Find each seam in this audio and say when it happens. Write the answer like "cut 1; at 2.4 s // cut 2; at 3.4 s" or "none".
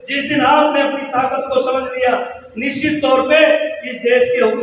none